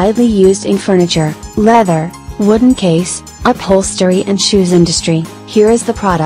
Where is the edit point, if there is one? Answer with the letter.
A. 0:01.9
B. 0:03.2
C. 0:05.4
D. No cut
C